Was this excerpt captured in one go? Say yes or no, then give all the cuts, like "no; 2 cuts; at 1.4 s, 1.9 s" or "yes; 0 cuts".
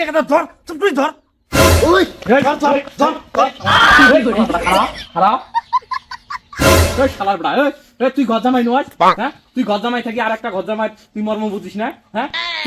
yes; 0 cuts